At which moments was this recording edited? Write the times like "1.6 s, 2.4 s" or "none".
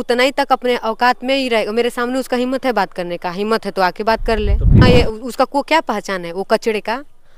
4.8 s